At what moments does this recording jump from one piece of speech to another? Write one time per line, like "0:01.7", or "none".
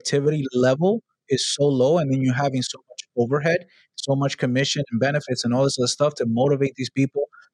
none